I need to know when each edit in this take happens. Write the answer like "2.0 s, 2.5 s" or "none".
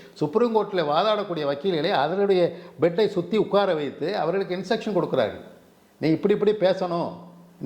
none